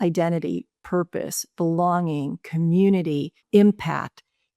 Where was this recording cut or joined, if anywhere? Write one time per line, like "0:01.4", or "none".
0:03.4